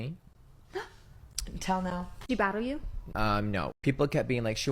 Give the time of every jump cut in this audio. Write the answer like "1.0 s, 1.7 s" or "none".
3.7 s